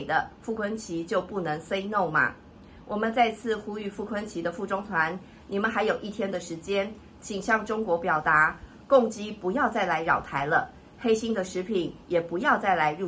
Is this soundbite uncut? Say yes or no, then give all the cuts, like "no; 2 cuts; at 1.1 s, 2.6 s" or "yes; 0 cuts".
yes; 0 cuts